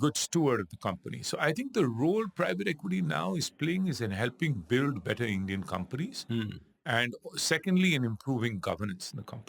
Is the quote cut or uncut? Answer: uncut